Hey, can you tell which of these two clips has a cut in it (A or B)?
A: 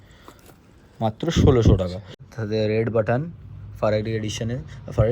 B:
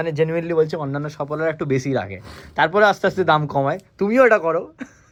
A